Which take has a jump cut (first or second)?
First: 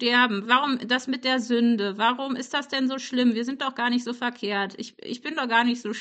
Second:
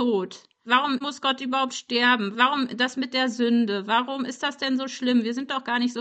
second